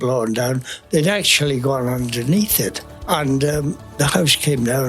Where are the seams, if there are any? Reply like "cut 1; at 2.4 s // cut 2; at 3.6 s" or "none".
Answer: cut 1; at 2.9 s // cut 2; at 3.8 s